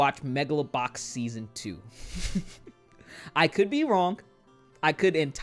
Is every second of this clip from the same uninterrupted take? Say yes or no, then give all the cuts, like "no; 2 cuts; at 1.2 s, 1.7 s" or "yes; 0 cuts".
yes; 0 cuts